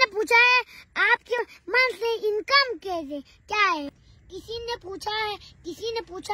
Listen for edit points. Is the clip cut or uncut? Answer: cut